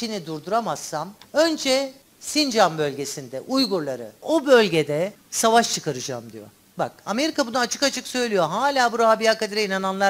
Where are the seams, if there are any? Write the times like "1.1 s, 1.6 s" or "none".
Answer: 4.2 s